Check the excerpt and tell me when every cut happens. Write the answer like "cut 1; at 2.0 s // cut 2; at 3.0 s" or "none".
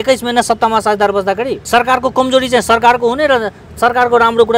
cut 1; at 1.6 s